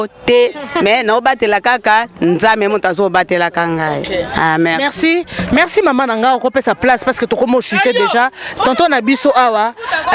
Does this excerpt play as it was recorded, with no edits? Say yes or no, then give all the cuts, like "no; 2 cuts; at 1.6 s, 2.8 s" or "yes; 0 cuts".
yes; 0 cuts